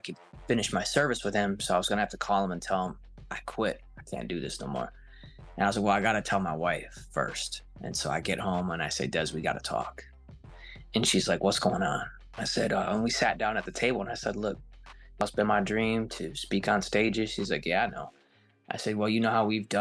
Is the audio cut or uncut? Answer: uncut